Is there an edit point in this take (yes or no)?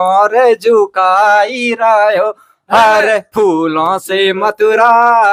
no